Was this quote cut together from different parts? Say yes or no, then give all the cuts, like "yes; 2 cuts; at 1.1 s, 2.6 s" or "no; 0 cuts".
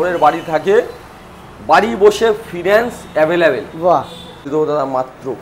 yes; 1 cut; at 4.5 s